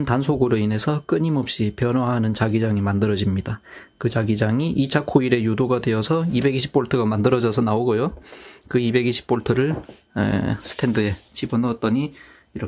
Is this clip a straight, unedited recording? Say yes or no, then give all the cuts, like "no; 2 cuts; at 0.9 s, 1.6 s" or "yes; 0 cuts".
yes; 0 cuts